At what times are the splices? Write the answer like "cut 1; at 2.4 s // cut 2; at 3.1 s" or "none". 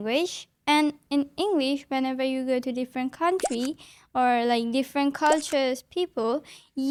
none

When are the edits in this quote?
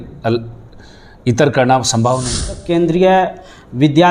cut 1; at 2.6 s

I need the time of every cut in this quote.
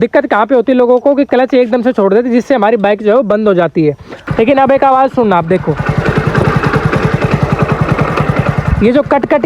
cut 1; at 4.1 s

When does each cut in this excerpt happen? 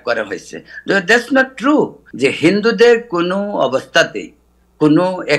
cut 1; at 2.0 s

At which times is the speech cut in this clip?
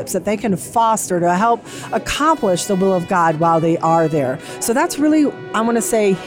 none

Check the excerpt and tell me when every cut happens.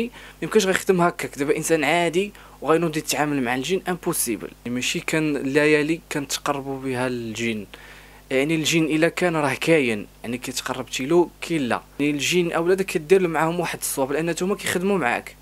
cut 1; at 4.6 s // cut 2; at 11.9 s

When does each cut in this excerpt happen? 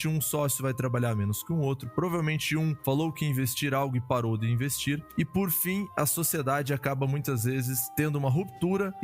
cut 1; at 5.1 s

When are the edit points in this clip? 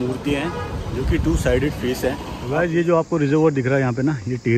cut 1; at 2.4 s

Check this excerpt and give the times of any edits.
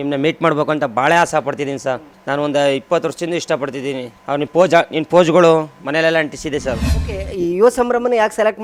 cut 1; at 2.1 s // cut 2; at 4.1 s // cut 3; at 6.9 s

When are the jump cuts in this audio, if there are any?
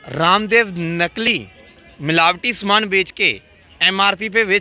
cut 1; at 1.3 s

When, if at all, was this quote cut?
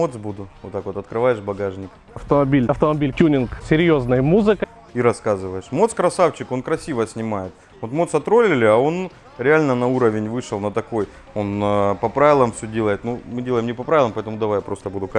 none

